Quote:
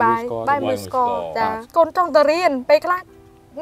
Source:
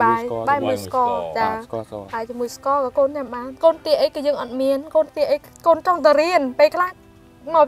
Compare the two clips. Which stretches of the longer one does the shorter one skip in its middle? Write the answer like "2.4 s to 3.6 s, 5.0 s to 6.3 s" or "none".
1.6 s to 5.5 s